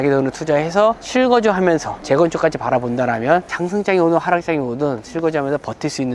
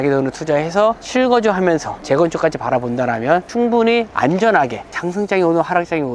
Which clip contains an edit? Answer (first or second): first